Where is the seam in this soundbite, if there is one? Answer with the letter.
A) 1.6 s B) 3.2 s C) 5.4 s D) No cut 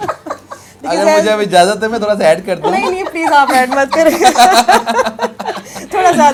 D